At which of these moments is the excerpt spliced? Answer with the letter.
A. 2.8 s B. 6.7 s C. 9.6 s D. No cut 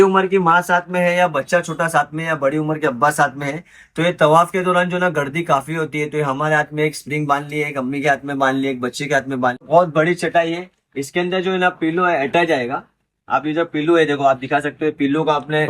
C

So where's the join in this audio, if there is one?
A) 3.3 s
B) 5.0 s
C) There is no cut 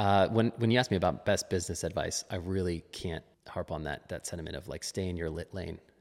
A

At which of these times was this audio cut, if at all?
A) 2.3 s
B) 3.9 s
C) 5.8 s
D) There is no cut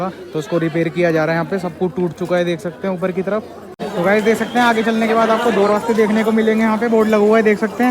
B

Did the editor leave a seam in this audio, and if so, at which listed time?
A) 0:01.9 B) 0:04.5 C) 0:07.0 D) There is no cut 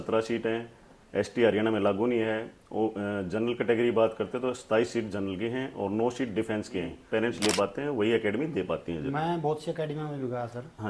C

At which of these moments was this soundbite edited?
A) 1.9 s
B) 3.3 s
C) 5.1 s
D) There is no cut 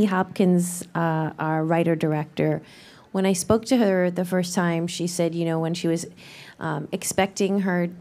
C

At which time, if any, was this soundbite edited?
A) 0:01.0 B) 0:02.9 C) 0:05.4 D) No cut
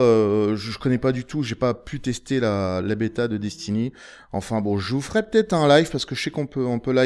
C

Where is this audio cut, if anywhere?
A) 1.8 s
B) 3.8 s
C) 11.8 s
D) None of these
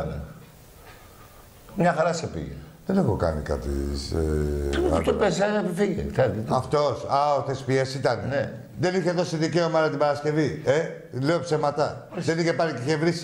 B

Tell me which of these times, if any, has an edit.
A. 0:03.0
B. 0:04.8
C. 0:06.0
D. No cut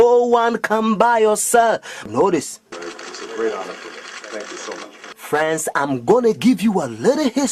C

